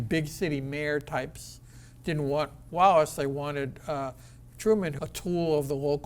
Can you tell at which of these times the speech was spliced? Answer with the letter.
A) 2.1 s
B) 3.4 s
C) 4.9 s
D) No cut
C